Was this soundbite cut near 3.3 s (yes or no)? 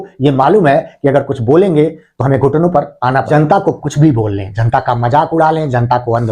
yes